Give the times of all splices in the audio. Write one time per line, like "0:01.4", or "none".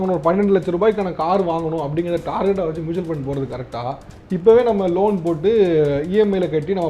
0:04.1